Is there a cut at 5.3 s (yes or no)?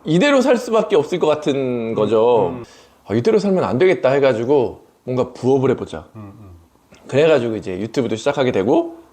no